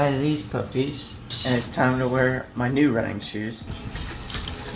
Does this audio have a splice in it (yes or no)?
yes